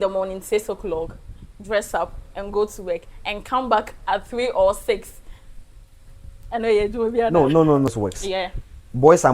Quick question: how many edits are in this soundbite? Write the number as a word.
one